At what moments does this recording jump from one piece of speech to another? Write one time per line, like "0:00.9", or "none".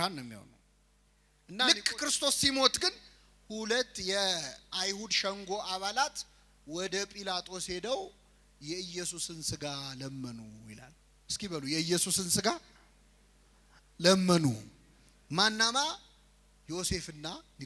0:01.6